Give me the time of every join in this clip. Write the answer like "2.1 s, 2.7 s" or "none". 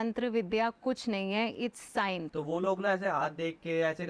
2.3 s